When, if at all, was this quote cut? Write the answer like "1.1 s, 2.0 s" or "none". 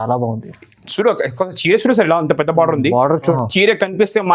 3.3 s